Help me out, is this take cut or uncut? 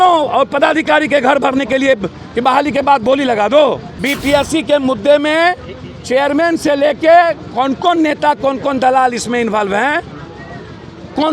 cut